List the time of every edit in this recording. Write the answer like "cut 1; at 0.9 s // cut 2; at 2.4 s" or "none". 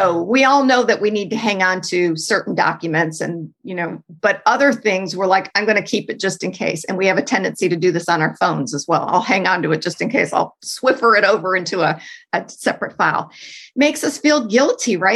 cut 1; at 10.6 s